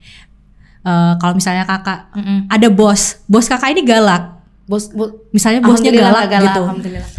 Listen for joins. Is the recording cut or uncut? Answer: uncut